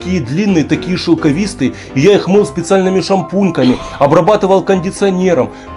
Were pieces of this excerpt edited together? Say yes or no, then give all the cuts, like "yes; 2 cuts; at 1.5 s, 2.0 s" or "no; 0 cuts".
no; 0 cuts